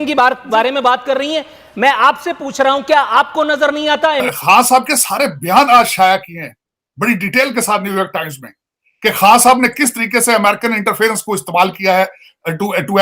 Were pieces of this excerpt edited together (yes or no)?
yes